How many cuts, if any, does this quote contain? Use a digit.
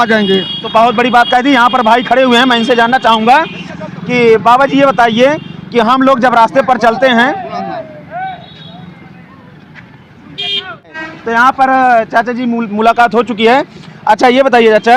0